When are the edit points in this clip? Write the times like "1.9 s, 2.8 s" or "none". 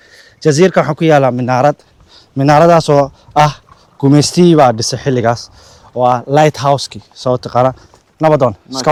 none